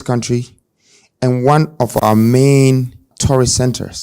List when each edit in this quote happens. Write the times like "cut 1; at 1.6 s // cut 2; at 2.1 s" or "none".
cut 1; at 3.1 s

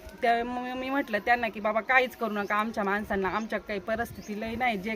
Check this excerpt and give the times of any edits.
none

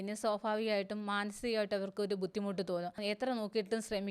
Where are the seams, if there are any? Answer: cut 1; at 3.0 s

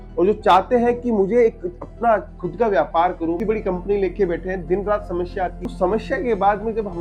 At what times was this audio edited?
cut 1; at 3.4 s // cut 2; at 5.6 s

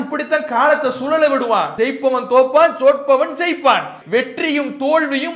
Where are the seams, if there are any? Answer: cut 1; at 4.0 s

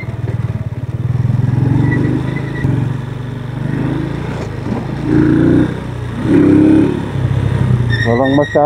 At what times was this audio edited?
cut 1; at 2.6 s

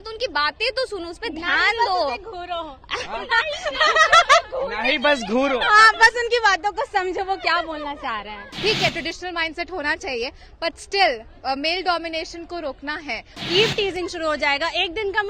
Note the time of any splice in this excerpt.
cut 1; at 8.4 s // cut 2; at 13.3 s

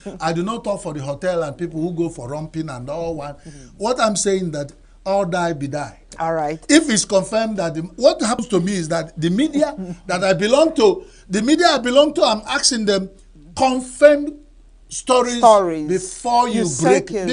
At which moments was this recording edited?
cut 1; at 8.4 s

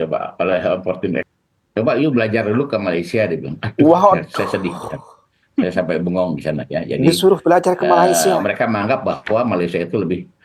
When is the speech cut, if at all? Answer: cut 1; at 1.3 s

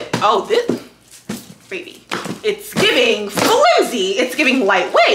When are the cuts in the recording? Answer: none

